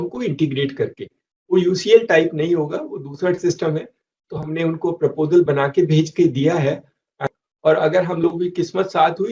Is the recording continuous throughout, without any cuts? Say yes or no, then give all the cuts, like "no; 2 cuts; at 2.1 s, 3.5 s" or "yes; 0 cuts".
no; 1 cut; at 7.2 s